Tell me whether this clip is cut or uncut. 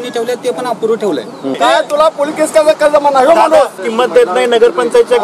cut